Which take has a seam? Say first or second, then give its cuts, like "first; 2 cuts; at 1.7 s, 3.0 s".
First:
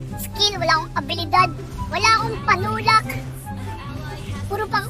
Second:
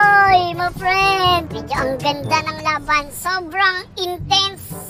second; 1 cut; at 1.4 s